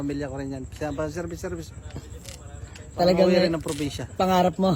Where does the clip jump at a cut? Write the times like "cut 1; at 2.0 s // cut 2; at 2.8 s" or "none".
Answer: none